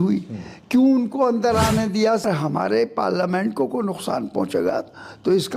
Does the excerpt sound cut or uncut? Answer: cut